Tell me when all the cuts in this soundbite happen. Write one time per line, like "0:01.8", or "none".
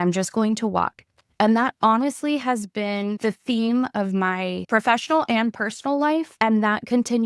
0:03.2
0:04.6
0:06.3